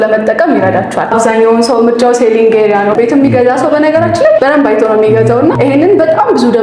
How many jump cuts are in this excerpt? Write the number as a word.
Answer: four